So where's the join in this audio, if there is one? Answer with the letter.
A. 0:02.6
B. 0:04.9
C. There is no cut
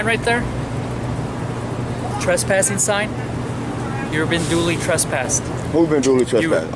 C